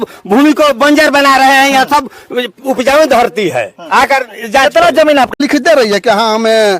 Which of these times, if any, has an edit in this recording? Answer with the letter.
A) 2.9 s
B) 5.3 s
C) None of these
B